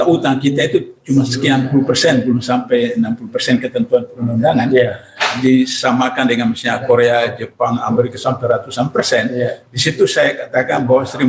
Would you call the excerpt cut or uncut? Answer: uncut